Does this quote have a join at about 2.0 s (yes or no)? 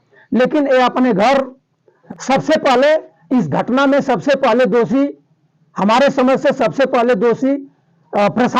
yes